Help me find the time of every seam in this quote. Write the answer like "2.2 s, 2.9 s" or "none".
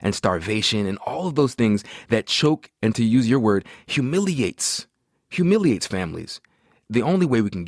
2.9 s, 6.8 s